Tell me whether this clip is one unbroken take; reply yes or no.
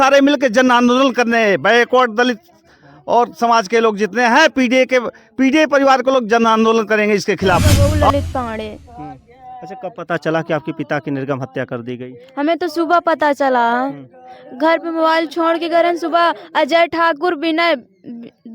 no